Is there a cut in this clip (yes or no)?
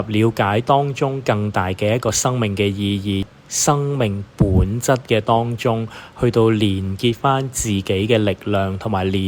yes